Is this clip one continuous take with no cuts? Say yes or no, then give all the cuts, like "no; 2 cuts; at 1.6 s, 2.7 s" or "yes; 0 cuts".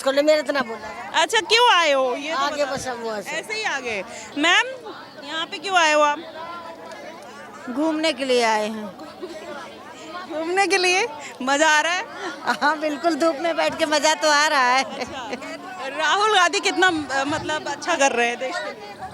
no; 1 cut; at 4.2 s